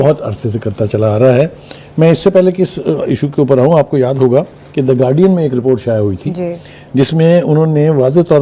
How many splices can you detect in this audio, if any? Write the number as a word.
zero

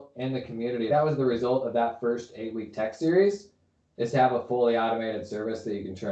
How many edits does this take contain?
zero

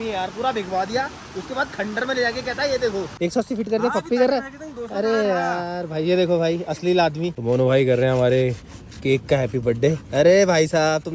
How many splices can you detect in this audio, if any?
two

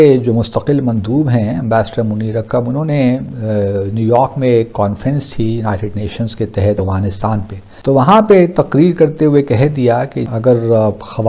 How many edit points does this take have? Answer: zero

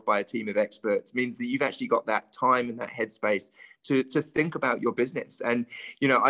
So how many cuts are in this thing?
zero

